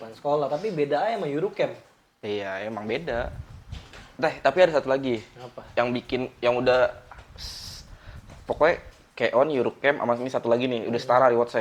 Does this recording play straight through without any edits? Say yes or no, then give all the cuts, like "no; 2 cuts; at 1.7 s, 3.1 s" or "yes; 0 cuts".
yes; 0 cuts